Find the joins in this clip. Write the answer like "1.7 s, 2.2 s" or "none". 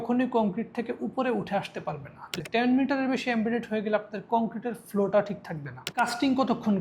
2.3 s, 5.9 s